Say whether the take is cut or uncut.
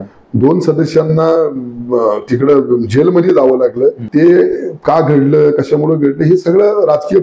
cut